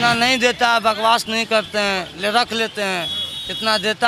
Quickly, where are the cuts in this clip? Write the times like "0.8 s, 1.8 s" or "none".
none